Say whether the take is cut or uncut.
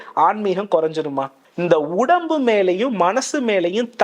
cut